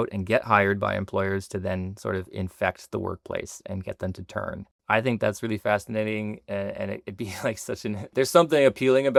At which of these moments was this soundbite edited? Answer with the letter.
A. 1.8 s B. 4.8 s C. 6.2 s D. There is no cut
D